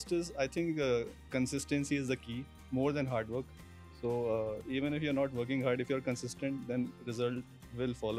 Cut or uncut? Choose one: uncut